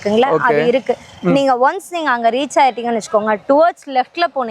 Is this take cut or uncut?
uncut